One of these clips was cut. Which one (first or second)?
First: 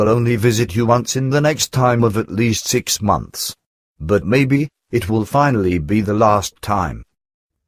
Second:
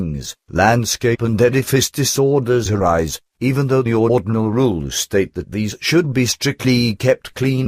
first